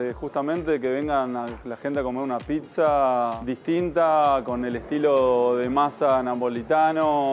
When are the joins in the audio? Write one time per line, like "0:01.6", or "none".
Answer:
none